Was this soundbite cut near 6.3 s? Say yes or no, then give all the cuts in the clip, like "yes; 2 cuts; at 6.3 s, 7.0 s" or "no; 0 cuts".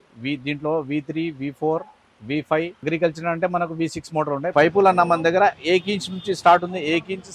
no; 2 cuts; at 2.8 s, 4.5 s